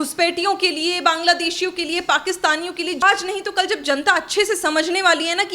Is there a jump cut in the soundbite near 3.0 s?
yes; 1 cut; at 3.0 s

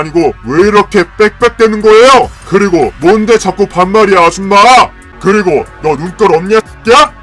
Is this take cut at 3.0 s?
no; 1 cut; at 5.0 s

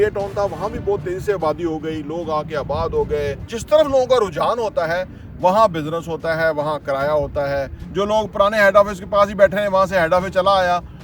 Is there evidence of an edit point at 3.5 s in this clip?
yes; 2 cuts; at 3.5 s, 7.8 s

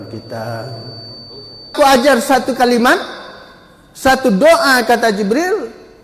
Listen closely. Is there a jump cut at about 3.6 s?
no; 1 cut; at 1.7 s

